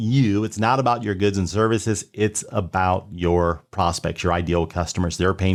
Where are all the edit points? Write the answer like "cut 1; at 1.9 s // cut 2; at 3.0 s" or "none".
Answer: none